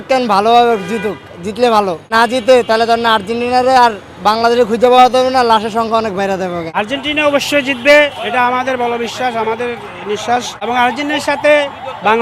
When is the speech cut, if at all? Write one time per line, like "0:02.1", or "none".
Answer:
0:02.1
0:06.7
0:10.7